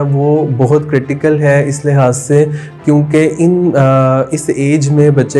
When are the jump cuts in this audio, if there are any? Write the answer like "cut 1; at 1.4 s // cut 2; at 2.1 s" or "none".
none